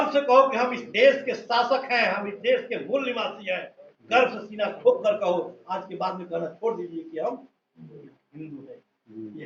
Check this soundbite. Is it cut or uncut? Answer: uncut